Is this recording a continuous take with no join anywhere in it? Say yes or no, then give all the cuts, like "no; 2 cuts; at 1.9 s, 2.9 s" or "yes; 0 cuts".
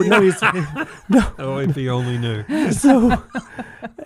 yes; 0 cuts